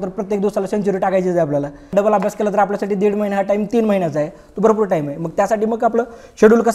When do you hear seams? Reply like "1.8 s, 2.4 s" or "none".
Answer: 1.9 s